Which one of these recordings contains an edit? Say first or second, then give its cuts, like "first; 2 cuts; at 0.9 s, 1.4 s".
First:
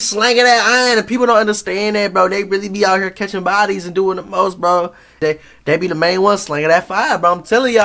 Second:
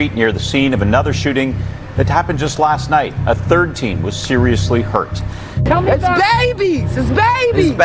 first; 1 cut; at 5.2 s